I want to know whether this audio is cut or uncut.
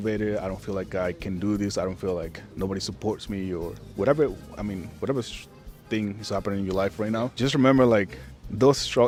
uncut